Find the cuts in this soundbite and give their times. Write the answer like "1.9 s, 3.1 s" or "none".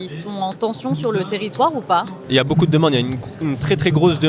2.2 s

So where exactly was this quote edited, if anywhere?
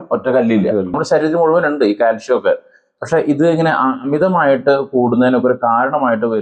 1.0 s

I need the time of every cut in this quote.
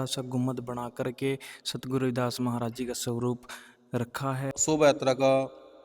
4.5 s

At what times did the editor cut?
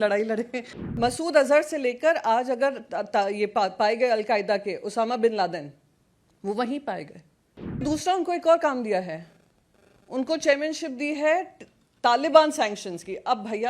0.9 s, 7.8 s

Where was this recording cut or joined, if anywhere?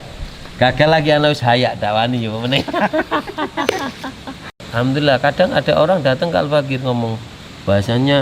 4.6 s

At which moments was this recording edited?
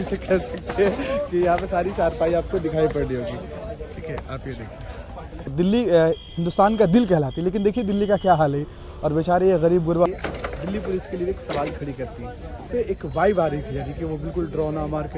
5.5 s, 10.1 s, 12.7 s

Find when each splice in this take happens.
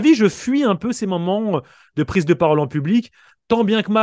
none

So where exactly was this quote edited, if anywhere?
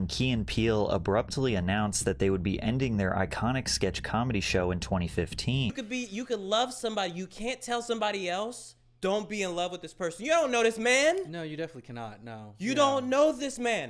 5.7 s

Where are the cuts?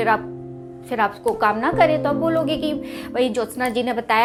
none

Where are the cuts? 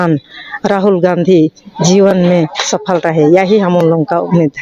none

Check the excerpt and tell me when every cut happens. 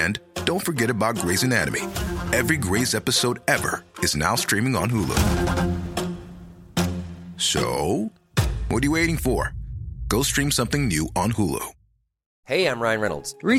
none

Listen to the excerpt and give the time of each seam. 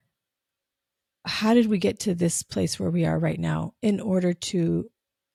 none

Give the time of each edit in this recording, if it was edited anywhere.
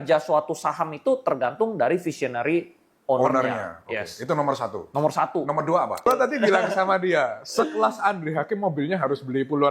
6.0 s

